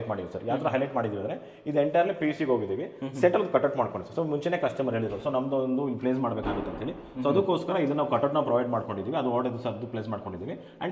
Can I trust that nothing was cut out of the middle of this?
yes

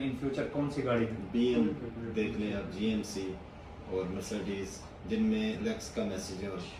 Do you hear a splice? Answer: no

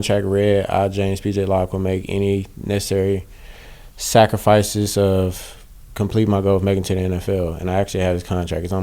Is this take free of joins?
yes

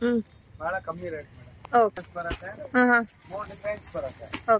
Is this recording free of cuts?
no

